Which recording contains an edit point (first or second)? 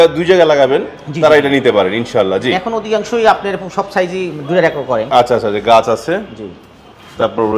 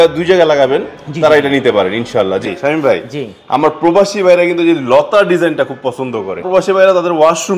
second